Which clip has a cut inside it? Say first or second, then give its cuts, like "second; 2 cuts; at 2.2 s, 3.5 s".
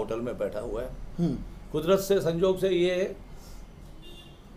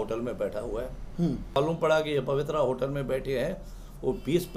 second; 1 cut; at 1.6 s